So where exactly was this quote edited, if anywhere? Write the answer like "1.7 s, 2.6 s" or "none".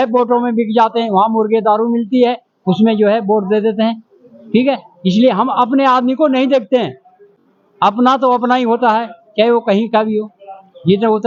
none